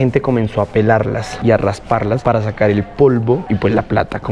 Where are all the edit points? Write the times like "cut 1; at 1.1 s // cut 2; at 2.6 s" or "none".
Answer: none